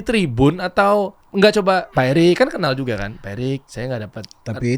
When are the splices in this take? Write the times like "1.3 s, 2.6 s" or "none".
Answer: 1.6 s, 3.7 s

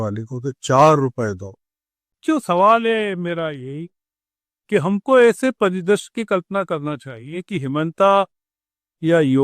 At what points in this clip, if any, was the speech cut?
2.2 s

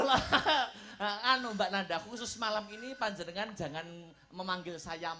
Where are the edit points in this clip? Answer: none

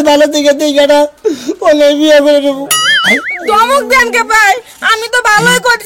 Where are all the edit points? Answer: 2.8 s

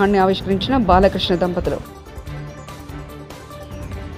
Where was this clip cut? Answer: none

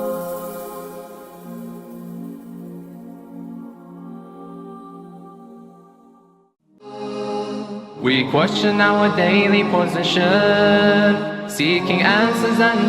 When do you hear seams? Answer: 7.0 s

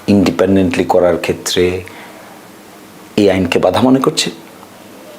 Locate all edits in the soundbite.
none

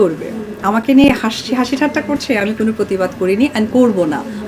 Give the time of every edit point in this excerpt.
none

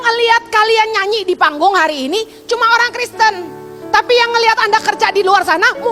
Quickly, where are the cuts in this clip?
none

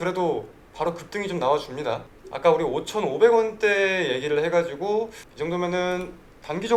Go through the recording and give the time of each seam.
none

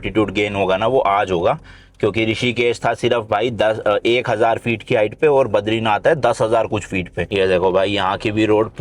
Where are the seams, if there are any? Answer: 7.3 s

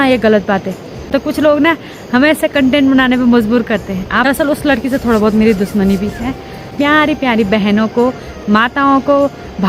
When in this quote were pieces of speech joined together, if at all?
1.1 s, 4.3 s, 6.7 s

